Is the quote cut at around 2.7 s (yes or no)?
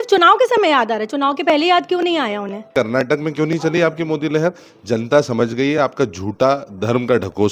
yes